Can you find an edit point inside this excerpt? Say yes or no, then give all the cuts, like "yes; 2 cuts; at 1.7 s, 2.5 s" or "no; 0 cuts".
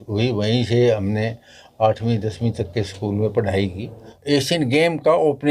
yes; 1 cut; at 4.1 s